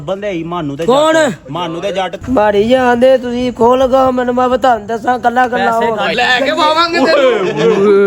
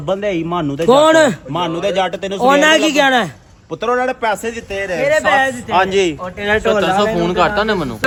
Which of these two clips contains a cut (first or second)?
first